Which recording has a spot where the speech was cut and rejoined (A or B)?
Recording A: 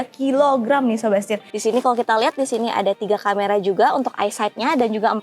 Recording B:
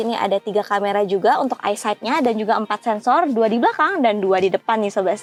A